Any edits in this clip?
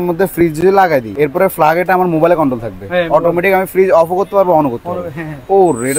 yes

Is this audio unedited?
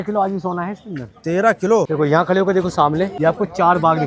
no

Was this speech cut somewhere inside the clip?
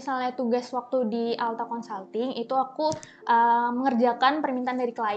no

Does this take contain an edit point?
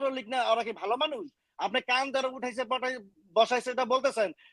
no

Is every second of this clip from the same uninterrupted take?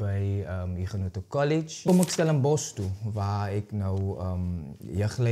no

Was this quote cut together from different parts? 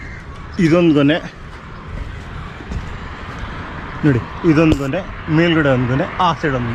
no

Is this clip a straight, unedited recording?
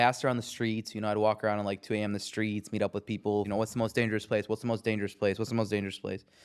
no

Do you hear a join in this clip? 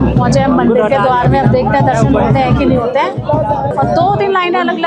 no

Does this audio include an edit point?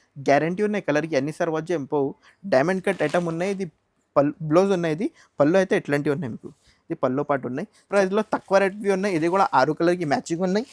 yes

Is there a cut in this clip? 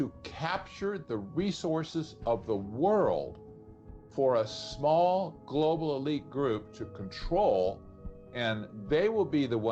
no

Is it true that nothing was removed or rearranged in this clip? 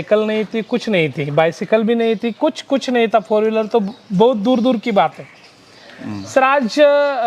yes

